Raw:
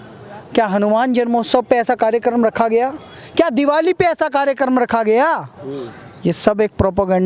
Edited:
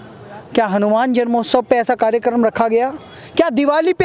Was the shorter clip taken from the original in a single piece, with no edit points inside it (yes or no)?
yes